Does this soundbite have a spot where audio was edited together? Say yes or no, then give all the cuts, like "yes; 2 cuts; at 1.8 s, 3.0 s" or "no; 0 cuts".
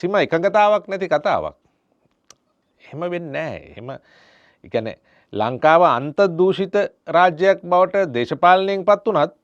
no; 0 cuts